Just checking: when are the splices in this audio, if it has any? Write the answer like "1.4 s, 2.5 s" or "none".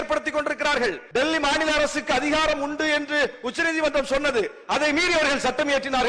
1.0 s